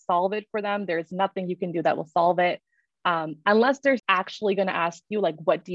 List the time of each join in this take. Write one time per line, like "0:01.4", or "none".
0:04.0

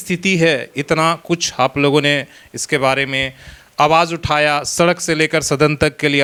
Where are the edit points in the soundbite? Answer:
none

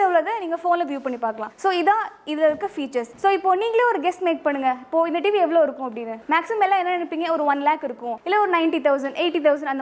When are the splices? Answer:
none

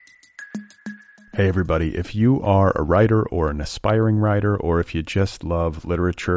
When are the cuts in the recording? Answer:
0:00.9

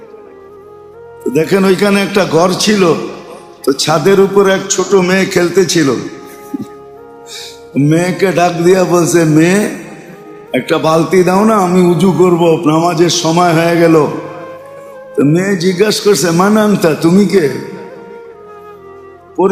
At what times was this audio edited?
none

